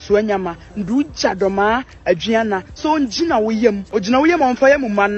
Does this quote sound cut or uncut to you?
cut